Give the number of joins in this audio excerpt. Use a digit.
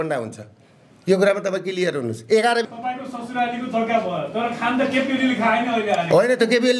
1